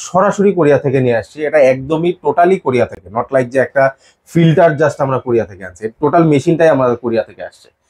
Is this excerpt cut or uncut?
uncut